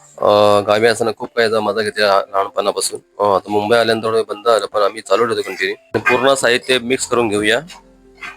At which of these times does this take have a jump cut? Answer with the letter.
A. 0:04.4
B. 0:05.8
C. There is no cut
B